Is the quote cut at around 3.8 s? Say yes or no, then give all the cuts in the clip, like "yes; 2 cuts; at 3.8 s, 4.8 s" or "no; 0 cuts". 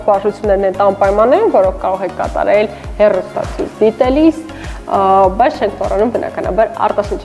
no; 0 cuts